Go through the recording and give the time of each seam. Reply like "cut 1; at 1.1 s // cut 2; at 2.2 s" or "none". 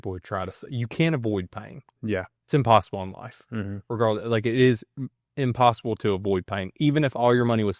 none